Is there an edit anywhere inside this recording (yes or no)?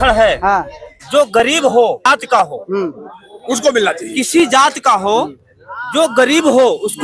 no